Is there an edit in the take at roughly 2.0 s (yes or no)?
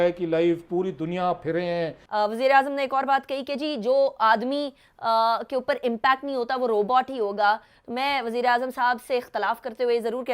yes